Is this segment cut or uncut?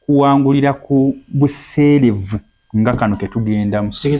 uncut